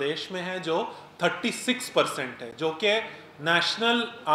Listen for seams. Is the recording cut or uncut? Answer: uncut